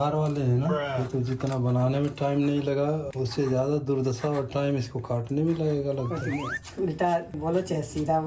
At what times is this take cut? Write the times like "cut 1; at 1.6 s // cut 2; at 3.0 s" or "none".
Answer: cut 1; at 1.0 s // cut 2; at 6.6 s // cut 3; at 7.3 s